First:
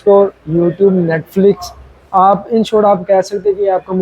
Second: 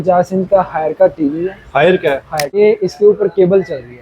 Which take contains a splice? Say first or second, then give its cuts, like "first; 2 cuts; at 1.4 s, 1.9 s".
second; 1 cut; at 2.6 s